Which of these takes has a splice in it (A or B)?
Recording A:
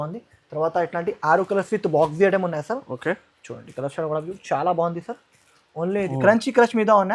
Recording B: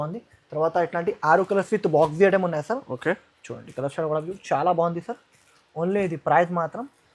A